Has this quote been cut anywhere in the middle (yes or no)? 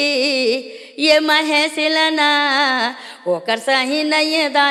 no